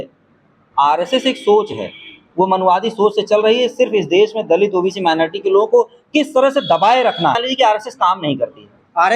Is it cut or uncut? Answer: cut